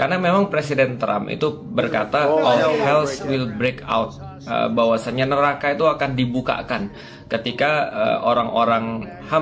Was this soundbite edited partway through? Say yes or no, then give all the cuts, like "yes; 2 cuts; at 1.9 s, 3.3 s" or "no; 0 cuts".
no; 0 cuts